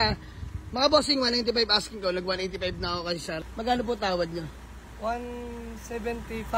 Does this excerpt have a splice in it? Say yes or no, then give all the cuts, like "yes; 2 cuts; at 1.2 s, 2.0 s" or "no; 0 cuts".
yes; 1 cut; at 3.4 s